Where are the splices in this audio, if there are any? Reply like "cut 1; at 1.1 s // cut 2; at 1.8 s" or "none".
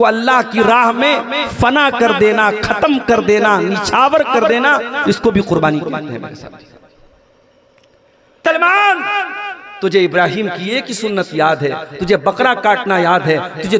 cut 1; at 8.4 s